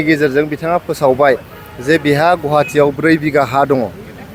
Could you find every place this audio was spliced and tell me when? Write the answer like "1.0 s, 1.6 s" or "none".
none